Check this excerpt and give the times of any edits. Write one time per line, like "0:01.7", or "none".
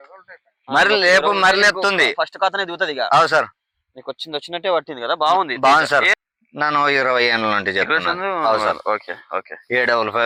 none